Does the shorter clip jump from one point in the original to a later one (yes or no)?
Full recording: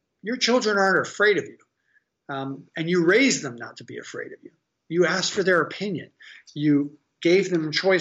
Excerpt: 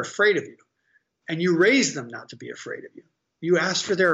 yes